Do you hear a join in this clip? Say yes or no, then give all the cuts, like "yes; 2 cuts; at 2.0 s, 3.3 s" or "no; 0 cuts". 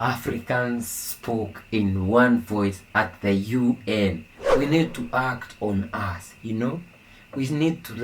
yes; 1 cut; at 4.4 s